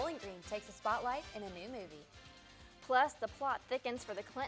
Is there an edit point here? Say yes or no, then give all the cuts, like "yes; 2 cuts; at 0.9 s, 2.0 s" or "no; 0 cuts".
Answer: no; 0 cuts